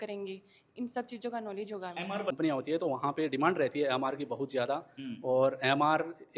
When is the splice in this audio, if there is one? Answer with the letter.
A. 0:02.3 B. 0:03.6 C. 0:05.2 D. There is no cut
A